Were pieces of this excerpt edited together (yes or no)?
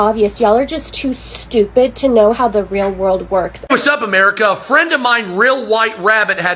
yes